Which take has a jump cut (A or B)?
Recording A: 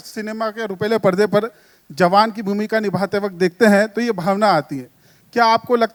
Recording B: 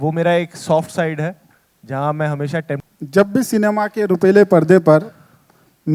B